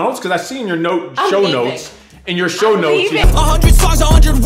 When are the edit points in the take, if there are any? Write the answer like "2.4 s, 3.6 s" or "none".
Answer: 3.2 s

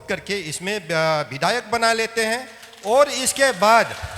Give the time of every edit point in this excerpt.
none

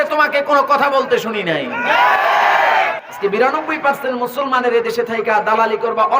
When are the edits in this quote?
3.1 s

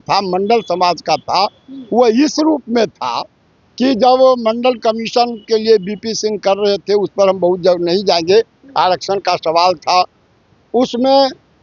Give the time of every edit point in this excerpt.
none

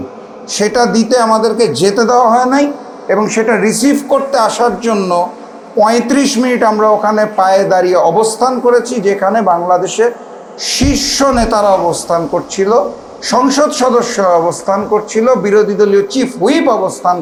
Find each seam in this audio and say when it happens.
none

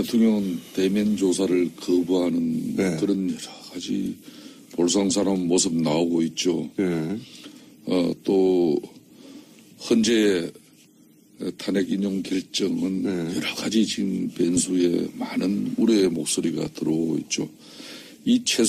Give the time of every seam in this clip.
5.7 s

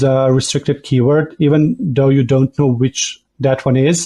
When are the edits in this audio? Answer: none

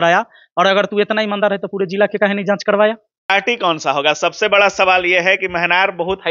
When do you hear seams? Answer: 3.3 s

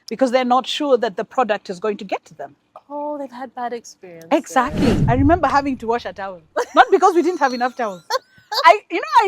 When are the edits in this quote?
5.0 s

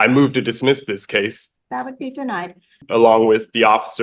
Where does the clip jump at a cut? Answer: 1.4 s, 2.8 s

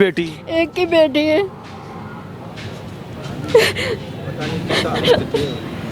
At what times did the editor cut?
none

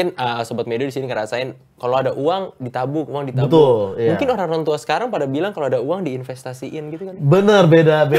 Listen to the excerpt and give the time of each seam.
none

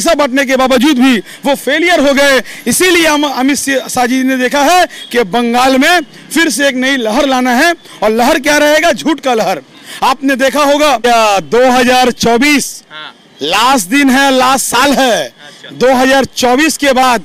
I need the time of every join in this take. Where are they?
11.0 s

